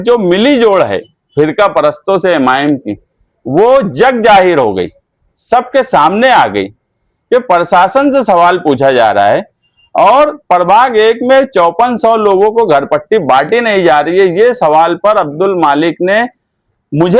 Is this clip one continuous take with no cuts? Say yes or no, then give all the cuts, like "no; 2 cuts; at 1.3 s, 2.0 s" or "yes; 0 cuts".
yes; 0 cuts